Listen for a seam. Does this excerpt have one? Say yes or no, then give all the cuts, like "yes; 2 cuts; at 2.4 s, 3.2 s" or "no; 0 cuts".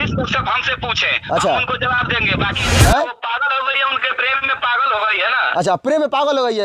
yes; 1 cut; at 2.6 s